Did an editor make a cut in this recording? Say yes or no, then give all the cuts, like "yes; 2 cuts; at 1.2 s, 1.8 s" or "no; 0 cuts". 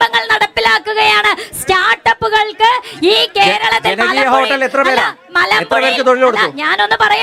no; 0 cuts